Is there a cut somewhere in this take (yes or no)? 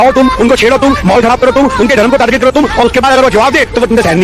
no